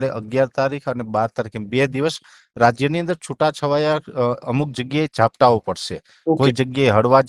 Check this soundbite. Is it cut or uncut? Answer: uncut